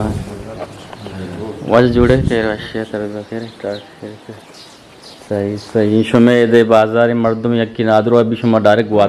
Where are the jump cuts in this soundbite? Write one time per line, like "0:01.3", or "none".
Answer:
none